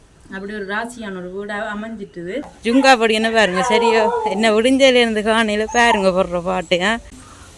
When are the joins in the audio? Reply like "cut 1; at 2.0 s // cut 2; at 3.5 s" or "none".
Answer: cut 1; at 2.5 s // cut 2; at 6.7 s